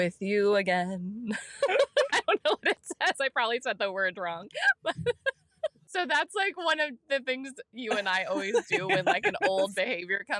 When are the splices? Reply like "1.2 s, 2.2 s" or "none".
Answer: 5.8 s